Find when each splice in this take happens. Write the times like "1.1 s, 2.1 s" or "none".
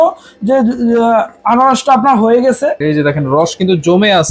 2.8 s